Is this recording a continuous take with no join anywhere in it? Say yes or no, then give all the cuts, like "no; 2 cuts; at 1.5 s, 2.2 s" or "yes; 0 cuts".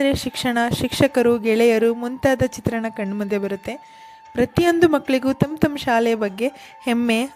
yes; 0 cuts